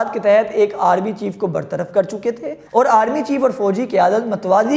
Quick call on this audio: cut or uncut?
uncut